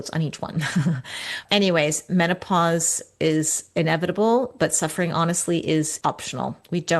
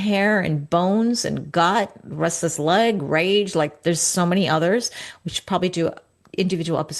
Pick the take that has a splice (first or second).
first